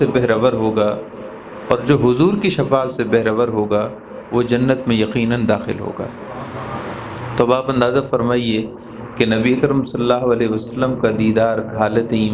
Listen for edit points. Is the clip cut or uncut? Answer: uncut